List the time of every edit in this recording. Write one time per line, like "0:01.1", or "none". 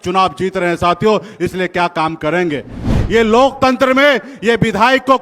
0:02.9